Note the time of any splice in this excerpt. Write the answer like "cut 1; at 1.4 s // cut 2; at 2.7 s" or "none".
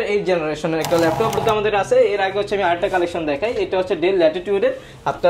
cut 1; at 1.4 s